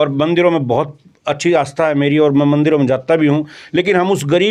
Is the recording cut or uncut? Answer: uncut